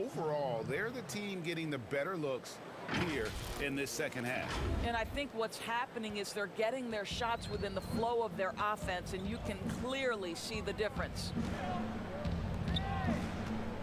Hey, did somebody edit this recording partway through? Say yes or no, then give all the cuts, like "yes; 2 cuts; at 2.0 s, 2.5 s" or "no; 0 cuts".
no; 0 cuts